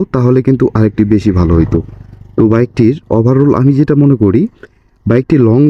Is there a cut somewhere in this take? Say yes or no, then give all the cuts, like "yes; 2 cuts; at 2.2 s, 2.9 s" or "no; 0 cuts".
no; 0 cuts